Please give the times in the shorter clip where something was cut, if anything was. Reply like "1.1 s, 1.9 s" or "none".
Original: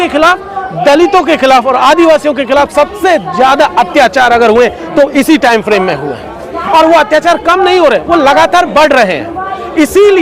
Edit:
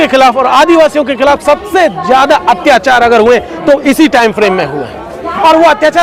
none